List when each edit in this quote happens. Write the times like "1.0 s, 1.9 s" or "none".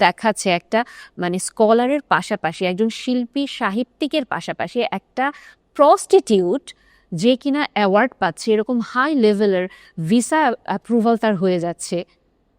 none